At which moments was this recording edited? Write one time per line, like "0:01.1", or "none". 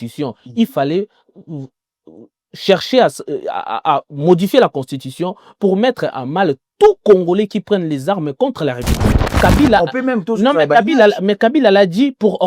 0:09.3